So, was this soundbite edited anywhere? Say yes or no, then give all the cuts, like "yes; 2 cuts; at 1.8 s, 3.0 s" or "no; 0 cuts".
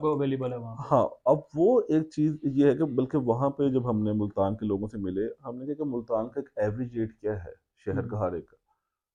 no; 0 cuts